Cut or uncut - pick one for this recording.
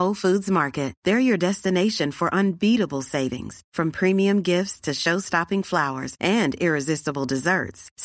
uncut